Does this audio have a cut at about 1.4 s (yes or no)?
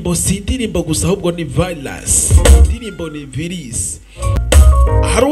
no